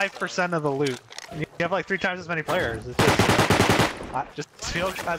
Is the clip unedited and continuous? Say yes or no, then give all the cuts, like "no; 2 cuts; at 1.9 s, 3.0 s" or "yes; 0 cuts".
yes; 0 cuts